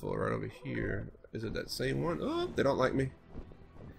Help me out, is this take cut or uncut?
cut